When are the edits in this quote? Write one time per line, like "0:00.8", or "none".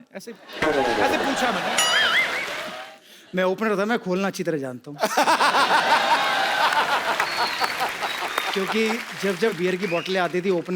0:02.7